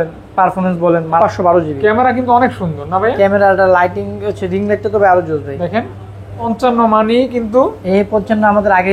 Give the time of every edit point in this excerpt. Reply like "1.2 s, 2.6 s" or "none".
1.2 s, 6.5 s